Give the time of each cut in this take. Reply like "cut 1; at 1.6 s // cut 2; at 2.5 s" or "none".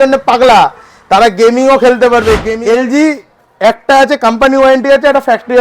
cut 1; at 2.5 s